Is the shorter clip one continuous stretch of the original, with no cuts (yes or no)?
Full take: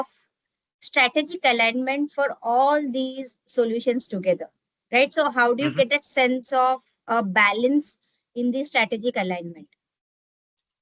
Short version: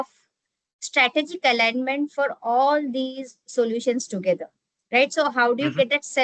yes